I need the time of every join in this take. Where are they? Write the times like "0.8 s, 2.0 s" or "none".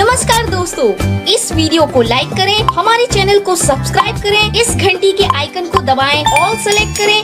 none